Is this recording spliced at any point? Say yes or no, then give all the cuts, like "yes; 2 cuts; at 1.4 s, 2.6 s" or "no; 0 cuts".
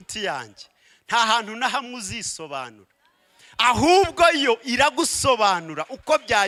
no; 0 cuts